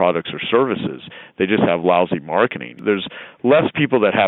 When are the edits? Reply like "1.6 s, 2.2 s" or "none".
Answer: 2.8 s